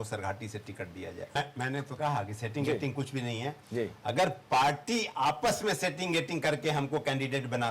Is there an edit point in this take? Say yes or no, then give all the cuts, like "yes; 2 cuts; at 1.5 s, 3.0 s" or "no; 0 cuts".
yes; 1 cut; at 1.3 s